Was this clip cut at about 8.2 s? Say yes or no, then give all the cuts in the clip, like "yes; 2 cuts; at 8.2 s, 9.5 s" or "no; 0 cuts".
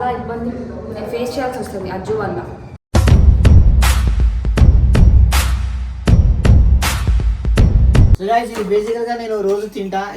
yes; 1 cut; at 8.2 s